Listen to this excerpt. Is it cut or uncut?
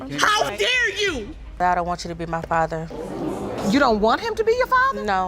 cut